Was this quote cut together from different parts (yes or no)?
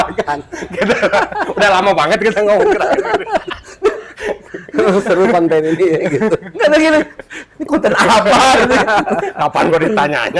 no